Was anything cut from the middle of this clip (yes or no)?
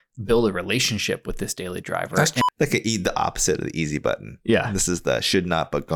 yes